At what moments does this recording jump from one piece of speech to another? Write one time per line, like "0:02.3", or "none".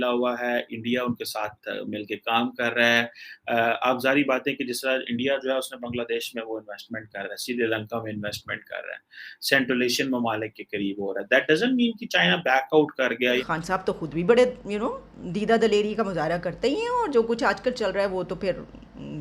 0:13.4